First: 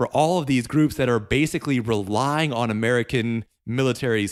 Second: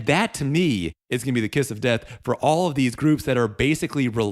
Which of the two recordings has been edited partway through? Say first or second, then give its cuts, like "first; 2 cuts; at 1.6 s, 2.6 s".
second; 1 cut; at 1.0 s